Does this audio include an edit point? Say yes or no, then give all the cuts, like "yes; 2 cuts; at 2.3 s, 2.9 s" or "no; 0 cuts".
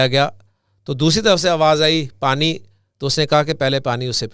no; 0 cuts